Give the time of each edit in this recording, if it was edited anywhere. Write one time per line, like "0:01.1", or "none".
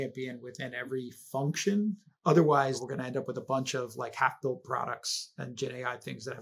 0:02.1
0:02.8

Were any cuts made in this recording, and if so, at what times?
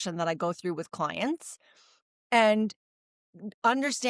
none

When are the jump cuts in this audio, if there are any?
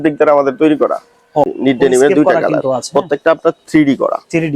0:01.5

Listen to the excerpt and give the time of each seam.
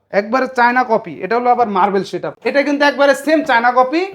0:02.3

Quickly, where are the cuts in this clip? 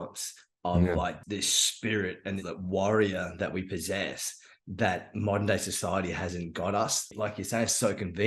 0:01.2
0:02.4
0:07.0

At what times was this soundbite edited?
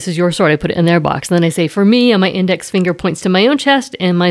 none

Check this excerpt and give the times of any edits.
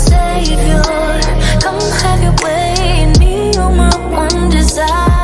none

